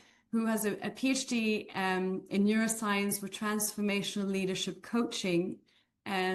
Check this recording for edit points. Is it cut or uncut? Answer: uncut